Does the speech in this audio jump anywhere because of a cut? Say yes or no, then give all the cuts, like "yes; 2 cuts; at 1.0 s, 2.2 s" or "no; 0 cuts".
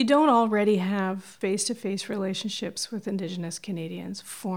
yes; 1 cut; at 1.3 s